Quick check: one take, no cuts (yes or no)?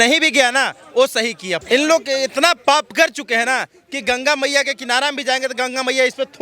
no